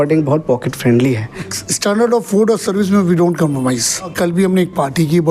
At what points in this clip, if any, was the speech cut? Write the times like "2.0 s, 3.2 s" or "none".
1.5 s, 4.1 s